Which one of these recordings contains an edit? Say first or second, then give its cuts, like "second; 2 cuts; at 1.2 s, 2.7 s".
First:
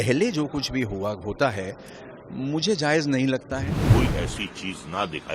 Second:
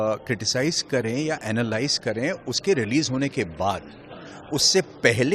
first; 1 cut; at 3.9 s